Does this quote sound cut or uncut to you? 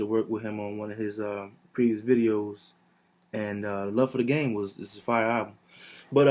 uncut